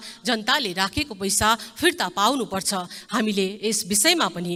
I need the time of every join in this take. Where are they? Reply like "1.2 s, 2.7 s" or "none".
none